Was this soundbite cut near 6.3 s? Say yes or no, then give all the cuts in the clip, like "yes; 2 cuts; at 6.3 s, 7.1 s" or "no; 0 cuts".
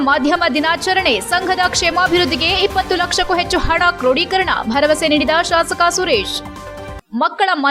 no; 0 cuts